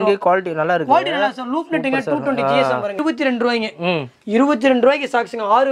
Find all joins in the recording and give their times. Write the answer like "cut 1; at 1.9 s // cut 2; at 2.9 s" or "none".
cut 1; at 3.0 s